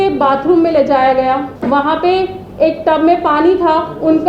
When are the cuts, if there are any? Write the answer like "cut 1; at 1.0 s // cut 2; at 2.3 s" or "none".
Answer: cut 1; at 1.5 s